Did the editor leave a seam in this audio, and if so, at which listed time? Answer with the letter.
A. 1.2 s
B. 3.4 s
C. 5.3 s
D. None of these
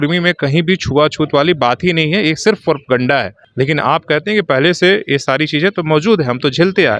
B